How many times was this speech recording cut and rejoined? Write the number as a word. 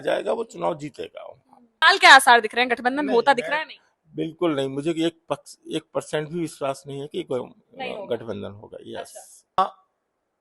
two